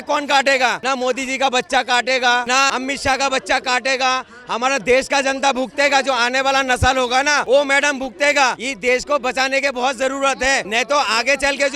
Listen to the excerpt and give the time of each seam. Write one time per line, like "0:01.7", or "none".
0:00.8
0:02.6
0:07.4
0:08.7
0:10.7